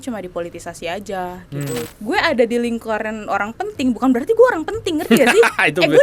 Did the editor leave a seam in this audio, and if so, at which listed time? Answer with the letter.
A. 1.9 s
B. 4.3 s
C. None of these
A